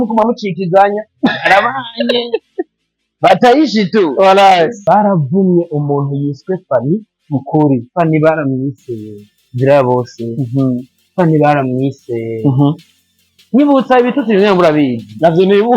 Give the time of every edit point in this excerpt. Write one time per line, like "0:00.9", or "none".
0:04.8